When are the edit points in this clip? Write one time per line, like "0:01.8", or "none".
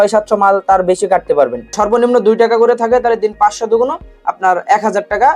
0:01.6